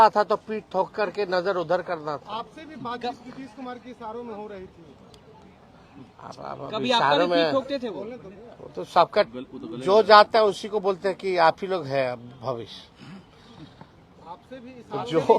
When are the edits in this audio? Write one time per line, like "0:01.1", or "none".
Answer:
none